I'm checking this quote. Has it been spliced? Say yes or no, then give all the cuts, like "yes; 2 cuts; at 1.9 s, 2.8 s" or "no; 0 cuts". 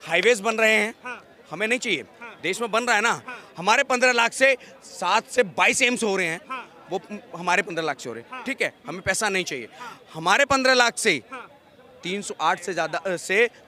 no; 0 cuts